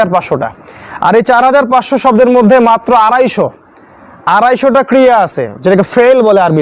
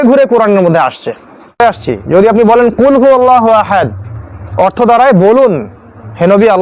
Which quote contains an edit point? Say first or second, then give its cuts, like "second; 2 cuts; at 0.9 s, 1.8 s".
second; 1 cut; at 1.6 s